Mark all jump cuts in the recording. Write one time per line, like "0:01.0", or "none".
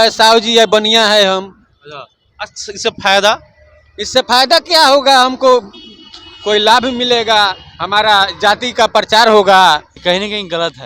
0:09.9